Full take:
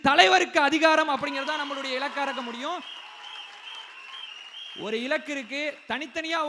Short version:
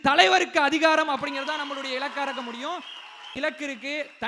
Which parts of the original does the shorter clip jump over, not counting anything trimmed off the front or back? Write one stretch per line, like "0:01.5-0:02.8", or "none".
0:03.3-0:05.0